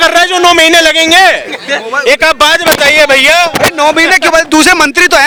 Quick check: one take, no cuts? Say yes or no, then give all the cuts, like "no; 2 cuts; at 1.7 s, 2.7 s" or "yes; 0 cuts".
yes; 0 cuts